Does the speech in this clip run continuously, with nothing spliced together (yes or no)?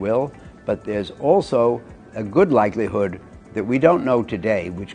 yes